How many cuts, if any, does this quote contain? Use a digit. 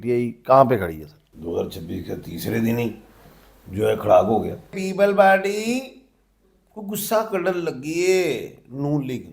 2